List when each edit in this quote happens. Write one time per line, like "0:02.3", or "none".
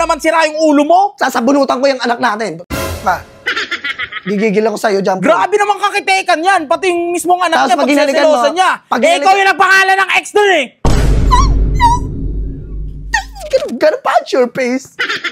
none